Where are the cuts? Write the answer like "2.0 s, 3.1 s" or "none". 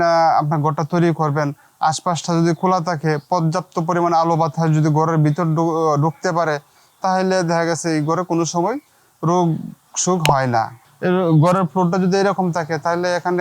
10.8 s